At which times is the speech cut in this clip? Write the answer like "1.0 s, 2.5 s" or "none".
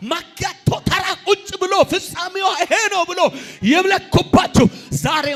none